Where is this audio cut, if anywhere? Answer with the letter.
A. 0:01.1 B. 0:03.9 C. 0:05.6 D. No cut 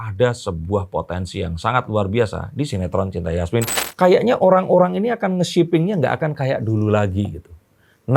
B